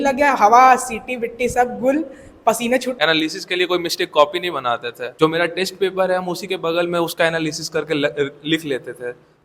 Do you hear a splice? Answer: yes; 2 cuts; at 2.9 s, 5.0 s

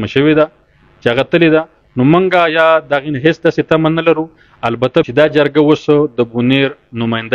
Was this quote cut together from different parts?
yes; 1 cut; at 5.1 s

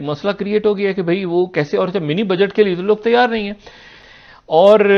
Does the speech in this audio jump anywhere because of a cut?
no; 0 cuts

